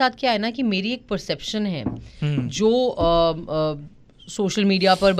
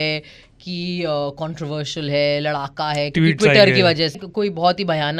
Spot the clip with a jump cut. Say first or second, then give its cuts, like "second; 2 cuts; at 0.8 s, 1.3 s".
second; 1 cut; at 4.2 s